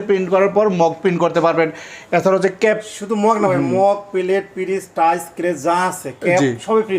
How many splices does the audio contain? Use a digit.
0